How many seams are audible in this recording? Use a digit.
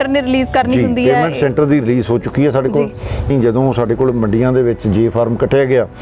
1